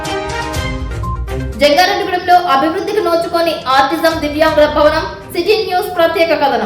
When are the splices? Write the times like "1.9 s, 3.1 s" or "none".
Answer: 1.1 s